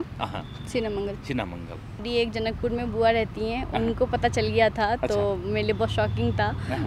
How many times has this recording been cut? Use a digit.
1